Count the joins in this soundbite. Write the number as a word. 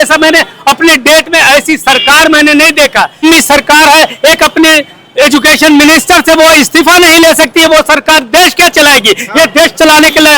one